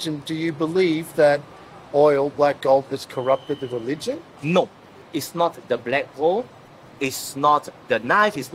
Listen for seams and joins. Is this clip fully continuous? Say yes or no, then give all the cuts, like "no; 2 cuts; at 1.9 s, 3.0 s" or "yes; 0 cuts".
yes; 0 cuts